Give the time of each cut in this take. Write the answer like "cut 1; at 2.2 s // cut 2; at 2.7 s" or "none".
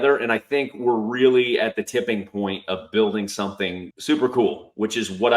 cut 1; at 3.9 s